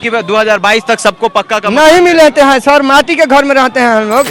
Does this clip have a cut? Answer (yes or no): no